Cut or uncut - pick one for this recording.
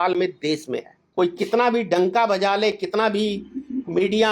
cut